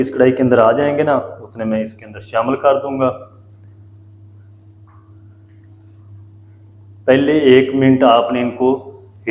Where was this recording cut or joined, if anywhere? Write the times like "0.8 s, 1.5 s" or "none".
none